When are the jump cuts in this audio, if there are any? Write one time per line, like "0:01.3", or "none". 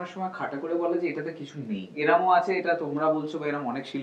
0:02.0